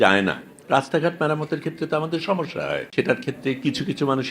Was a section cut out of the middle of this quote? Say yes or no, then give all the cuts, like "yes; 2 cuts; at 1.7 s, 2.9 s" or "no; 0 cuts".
yes; 1 cut; at 2.9 s